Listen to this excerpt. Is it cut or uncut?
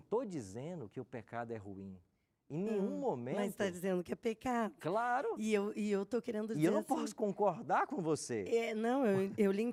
uncut